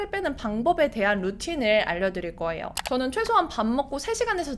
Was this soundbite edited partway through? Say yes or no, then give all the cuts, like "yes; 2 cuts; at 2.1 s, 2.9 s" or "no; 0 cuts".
no; 0 cuts